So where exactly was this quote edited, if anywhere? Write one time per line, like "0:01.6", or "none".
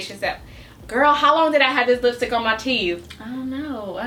none